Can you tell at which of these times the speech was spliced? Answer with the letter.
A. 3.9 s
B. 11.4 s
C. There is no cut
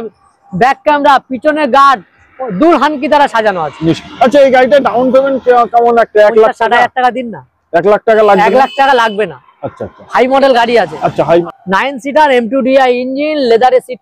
B